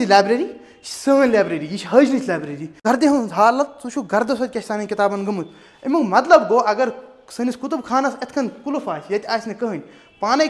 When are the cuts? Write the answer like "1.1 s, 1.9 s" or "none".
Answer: 2.8 s